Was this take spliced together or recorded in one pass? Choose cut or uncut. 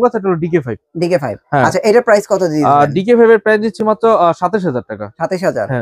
uncut